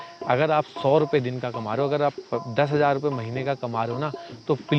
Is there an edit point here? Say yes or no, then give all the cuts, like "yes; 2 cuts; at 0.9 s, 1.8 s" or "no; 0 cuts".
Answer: no; 0 cuts